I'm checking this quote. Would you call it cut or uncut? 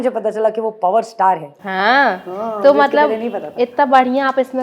uncut